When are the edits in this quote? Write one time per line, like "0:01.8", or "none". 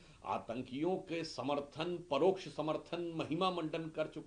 none